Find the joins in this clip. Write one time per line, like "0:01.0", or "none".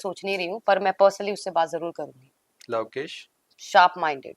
0:02.5